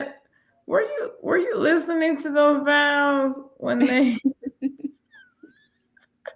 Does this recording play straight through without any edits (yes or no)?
yes